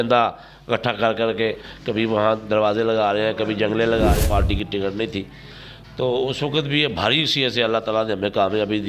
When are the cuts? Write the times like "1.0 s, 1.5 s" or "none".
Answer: 1.7 s, 4.2 s